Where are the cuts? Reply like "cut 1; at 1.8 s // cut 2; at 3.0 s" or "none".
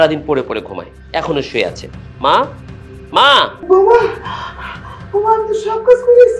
cut 1; at 3.6 s